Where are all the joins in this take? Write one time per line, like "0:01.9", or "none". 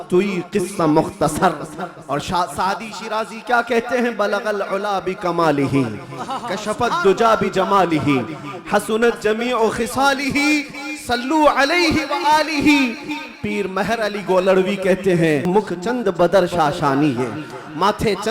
0:15.4

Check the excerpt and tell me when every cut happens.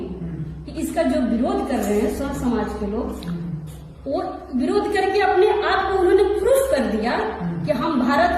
none

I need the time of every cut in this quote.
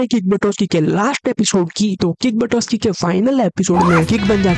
none

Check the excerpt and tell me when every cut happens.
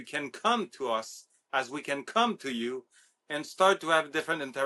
none

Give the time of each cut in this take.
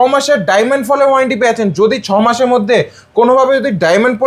none

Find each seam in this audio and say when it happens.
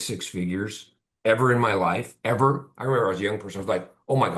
none

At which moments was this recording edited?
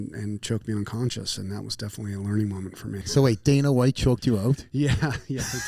0:03.0

